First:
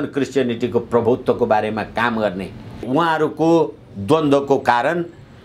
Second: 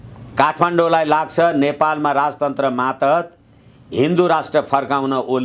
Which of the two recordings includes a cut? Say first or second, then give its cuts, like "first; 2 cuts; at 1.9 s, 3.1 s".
first; 1 cut; at 2.8 s